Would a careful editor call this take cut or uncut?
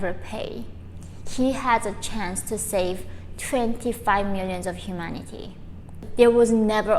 cut